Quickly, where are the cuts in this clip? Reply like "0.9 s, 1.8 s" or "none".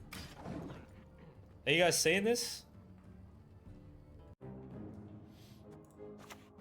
4.3 s